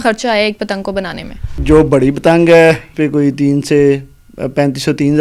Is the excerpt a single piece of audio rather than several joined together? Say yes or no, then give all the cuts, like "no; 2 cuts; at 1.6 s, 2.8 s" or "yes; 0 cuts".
no; 2 cuts; at 1.6 s, 2.9 s